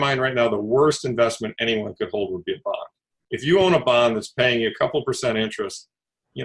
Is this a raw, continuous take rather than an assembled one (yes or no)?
no